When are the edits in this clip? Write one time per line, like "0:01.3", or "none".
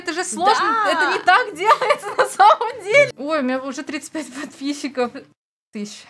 0:03.1